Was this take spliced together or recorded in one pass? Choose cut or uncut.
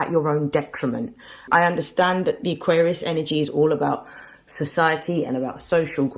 cut